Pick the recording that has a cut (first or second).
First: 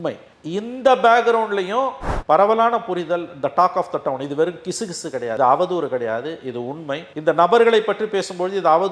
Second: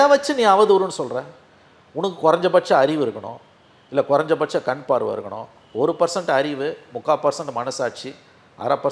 first